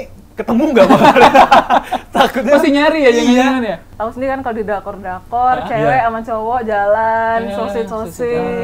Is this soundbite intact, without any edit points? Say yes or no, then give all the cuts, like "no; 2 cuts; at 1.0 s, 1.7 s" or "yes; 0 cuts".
no; 1 cut; at 3.9 s